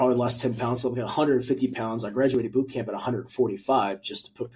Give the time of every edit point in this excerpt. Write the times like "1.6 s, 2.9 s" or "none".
none